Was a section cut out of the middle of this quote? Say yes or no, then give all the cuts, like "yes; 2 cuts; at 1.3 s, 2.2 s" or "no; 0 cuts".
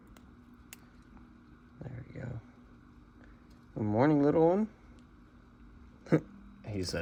no; 0 cuts